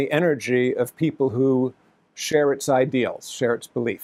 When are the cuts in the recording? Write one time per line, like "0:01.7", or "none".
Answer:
none